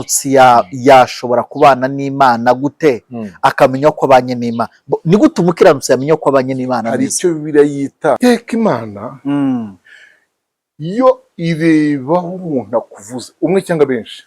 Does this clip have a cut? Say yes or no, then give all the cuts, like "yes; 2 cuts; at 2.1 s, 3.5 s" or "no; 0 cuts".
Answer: yes; 1 cut; at 8.2 s